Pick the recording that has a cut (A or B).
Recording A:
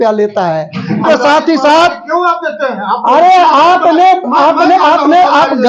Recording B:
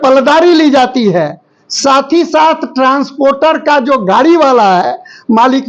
A